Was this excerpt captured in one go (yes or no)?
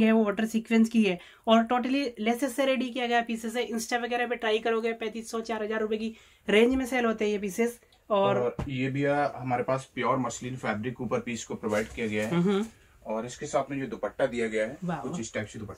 yes